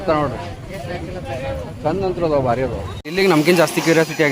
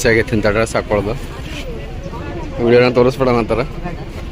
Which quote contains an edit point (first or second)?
first